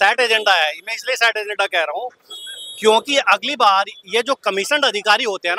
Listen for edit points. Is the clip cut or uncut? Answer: uncut